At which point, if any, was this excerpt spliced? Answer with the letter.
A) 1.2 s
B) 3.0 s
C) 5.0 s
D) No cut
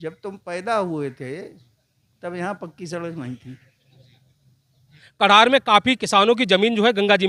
C